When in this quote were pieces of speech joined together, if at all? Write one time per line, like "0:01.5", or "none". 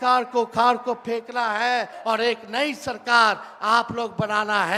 0:01.9